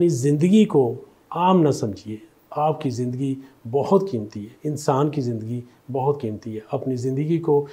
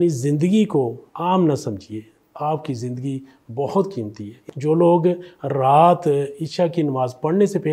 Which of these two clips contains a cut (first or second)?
second